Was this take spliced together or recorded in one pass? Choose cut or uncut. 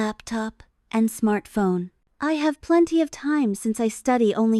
uncut